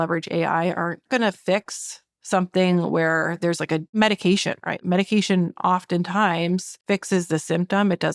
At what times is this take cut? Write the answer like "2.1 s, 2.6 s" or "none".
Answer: 1.0 s, 3.9 s, 4.8 s, 6.7 s